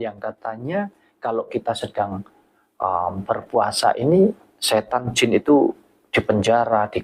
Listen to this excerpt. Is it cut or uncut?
uncut